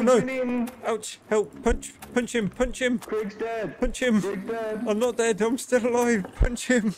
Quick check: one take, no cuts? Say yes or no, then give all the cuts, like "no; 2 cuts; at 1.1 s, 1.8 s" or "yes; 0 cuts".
yes; 0 cuts